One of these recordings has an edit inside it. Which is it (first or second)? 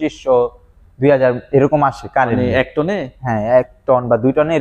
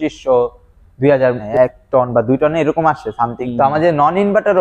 second